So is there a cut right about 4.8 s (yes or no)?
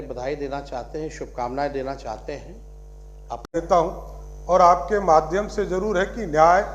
no